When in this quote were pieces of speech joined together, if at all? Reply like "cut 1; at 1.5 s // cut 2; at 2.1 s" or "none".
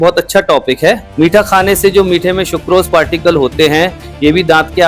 cut 1; at 1.1 s